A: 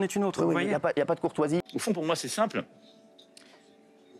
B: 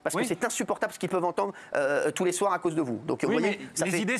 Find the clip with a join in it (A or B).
A